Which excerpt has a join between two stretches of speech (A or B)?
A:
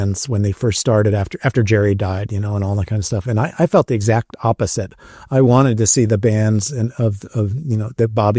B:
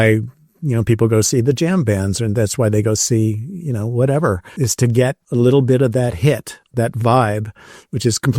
B